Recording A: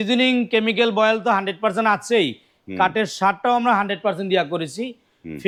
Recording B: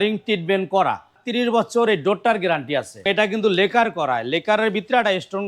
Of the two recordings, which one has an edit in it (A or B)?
B